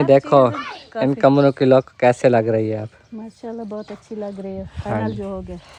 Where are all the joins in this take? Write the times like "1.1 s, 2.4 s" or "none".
none